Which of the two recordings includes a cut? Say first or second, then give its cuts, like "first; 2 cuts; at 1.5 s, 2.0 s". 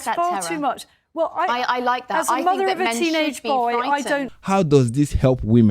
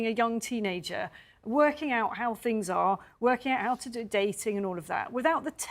first; 1 cut; at 4.3 s